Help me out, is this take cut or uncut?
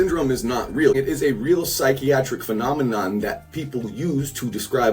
cut